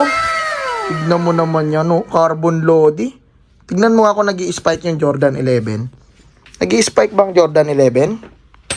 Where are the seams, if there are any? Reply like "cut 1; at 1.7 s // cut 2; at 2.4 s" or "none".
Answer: none